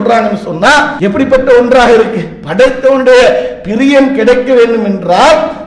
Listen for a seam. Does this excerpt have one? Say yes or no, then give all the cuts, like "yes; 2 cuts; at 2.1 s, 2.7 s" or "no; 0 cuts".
yes; 1 cut; at 0.9 s